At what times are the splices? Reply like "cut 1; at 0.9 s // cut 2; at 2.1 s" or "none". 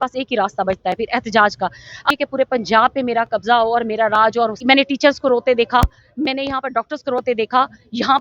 cut 1; at 2.1 s // cut 2; at 4.6 s

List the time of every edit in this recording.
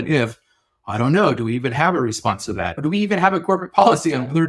cut 1; at 2.8 s

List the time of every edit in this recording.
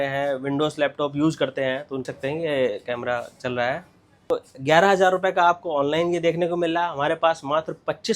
cut 1; at 2.0 s // cut 2; at 4.2 s

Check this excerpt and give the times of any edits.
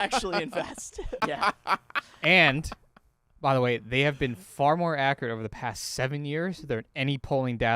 cut 1; at 1.2 s

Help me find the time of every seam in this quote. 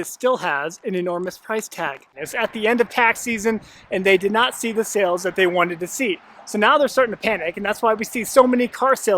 cut 1; at 2.2 s

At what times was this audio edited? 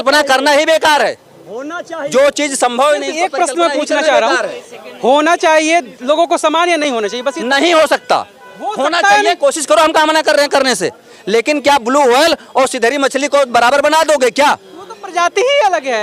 none

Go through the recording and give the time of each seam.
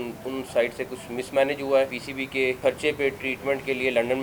cut 1; at 2.2 s

